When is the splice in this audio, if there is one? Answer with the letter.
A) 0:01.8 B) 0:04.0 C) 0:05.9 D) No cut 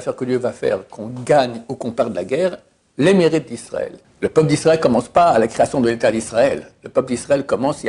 B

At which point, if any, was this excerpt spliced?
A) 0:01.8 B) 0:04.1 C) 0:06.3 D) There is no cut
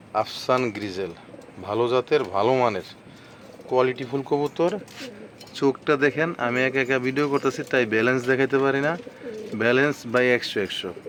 D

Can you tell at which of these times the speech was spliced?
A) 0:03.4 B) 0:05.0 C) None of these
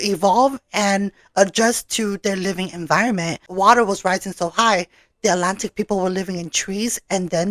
A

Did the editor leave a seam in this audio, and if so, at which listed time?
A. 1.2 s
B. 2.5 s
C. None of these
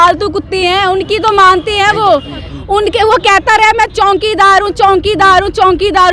B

